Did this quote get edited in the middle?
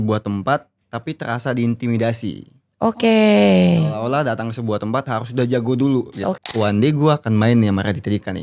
yes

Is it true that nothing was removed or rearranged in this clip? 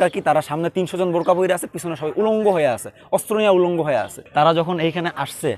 no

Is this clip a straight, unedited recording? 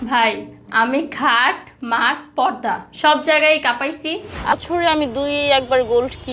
no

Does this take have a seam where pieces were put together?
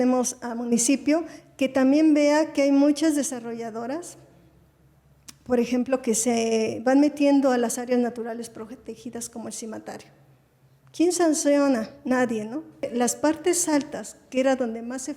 yes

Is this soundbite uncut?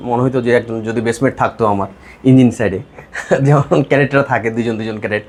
yes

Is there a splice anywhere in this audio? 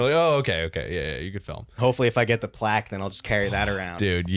no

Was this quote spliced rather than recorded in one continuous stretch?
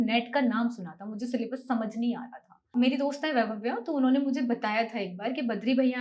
yes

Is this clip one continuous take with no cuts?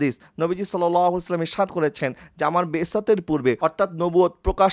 yes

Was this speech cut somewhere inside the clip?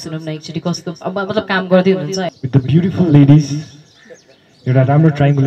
yes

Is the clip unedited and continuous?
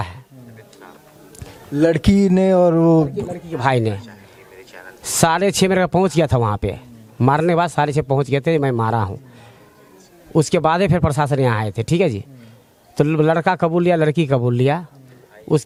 yes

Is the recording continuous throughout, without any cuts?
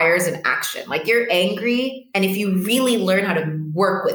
no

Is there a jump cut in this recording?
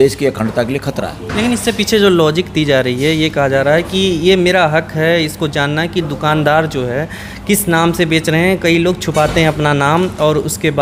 no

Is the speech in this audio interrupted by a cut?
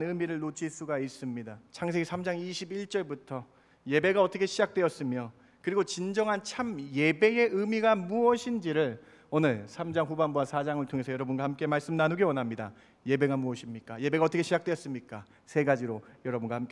yes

